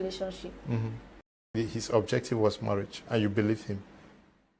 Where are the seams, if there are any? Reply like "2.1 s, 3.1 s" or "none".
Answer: 1.4 s